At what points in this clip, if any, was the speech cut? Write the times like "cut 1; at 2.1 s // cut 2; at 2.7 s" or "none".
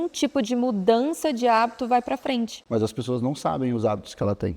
cut 1; at 2.6 s